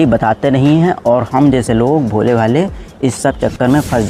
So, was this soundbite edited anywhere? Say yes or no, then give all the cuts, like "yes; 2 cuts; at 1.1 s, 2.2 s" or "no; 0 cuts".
no; 0 cuts